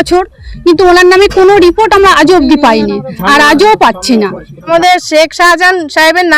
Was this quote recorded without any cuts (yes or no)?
no